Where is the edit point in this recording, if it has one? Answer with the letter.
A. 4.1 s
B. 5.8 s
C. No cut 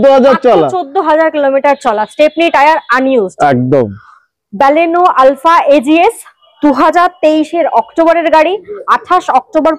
C